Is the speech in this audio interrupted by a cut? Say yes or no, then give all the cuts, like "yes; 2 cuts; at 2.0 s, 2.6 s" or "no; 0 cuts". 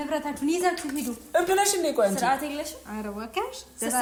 no; 0 cuts